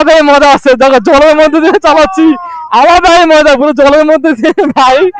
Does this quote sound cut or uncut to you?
uncut